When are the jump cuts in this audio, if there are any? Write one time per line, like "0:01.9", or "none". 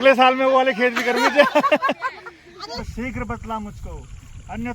0:02.8